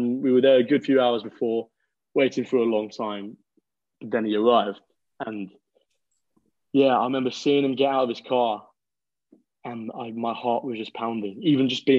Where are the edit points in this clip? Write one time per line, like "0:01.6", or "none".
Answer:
none